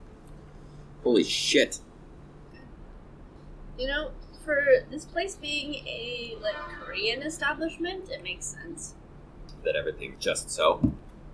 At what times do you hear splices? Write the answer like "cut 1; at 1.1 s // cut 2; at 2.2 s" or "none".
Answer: cut 1; at 2.5 s